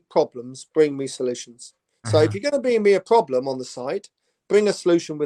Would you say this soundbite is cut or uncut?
uncut